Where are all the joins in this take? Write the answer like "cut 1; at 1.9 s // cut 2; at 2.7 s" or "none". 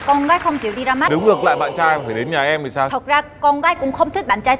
cut 1; at 1.1 s